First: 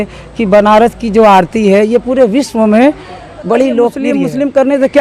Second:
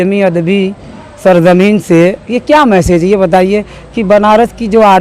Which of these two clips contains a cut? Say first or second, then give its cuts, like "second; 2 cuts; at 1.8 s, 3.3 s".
first; 1 cut; at 4.0 s